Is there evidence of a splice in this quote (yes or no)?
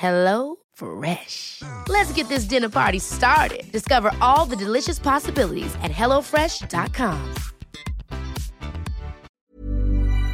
yes